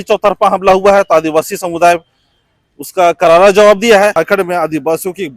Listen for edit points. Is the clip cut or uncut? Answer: cut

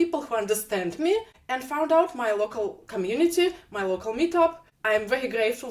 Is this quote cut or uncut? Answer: cut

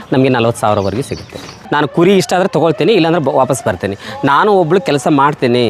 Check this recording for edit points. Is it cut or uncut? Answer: cut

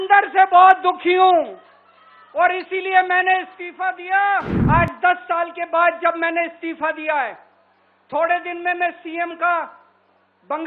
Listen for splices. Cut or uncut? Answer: cut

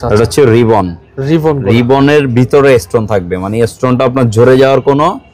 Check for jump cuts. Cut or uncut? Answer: uncut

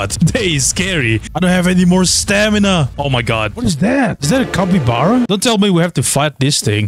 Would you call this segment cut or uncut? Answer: cut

